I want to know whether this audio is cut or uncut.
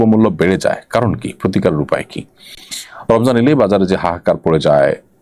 uncut